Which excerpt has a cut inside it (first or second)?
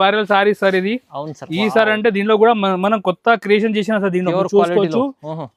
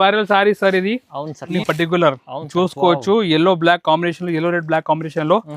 second